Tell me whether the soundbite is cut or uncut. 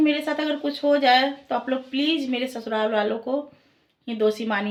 uncut